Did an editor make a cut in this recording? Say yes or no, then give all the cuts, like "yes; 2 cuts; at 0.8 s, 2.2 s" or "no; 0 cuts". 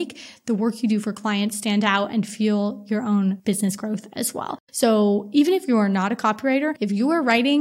yes; 3 cuts; at 3.4 s, 4.6 s, 6.8 s